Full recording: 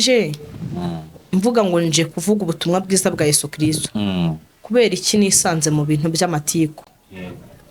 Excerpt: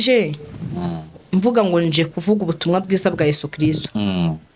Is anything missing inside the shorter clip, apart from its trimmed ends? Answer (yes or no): no